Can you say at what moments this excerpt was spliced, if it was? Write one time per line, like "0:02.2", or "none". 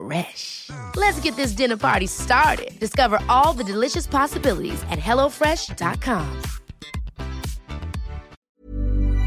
0:08.3